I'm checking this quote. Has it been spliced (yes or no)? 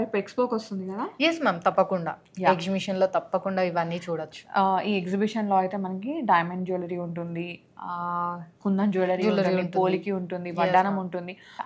no